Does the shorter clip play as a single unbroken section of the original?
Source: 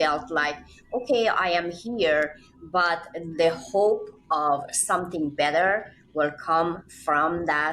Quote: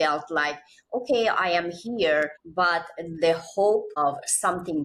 no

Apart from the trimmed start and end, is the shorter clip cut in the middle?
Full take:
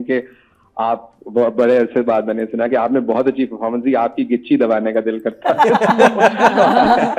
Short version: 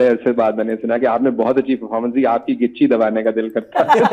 no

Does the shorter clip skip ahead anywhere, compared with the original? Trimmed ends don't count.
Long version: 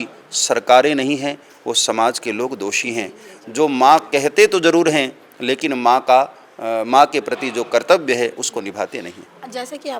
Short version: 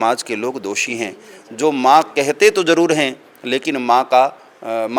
no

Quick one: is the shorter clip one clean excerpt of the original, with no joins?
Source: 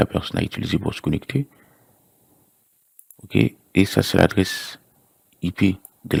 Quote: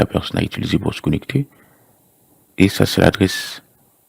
no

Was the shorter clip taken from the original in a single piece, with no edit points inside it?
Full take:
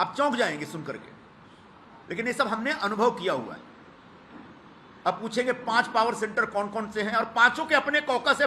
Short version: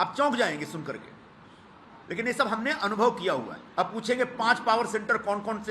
no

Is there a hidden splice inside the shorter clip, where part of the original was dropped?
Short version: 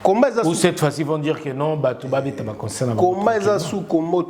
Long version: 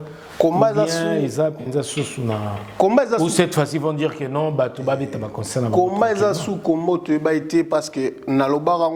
no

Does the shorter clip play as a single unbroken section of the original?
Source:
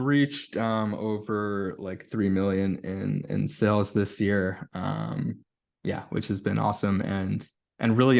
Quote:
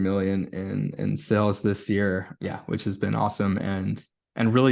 no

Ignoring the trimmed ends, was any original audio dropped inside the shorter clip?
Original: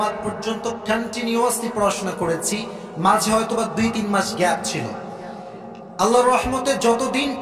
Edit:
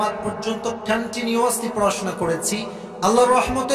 yes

